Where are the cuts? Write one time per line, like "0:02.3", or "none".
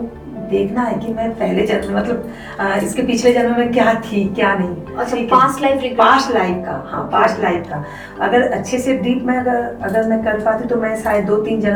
none